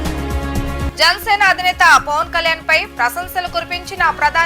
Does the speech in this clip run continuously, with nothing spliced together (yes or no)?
no